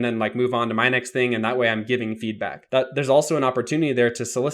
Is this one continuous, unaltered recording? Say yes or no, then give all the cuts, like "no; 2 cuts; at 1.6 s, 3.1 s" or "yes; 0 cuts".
no; 1 cut; at 2.5 s